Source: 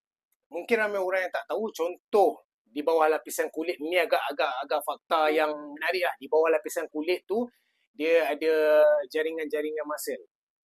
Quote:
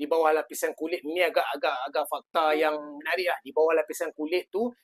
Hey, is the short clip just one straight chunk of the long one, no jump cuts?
yes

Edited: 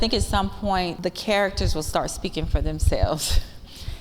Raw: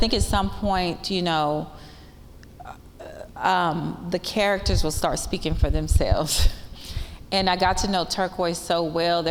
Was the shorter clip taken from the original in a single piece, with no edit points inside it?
no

